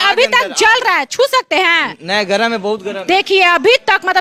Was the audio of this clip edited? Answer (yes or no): no